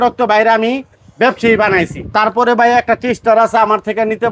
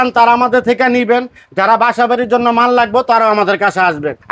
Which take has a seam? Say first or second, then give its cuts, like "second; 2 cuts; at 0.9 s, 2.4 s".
first; 1 cut; at 2.0 s